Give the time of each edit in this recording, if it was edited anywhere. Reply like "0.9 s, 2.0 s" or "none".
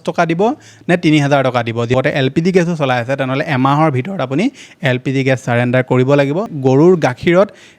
1.9 s, 6.5 s